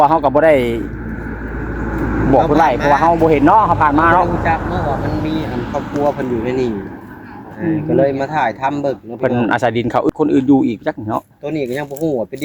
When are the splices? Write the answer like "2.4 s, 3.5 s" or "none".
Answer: 10.1 s